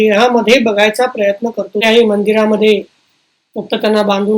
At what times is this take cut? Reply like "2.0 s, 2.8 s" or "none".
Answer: 1.8 s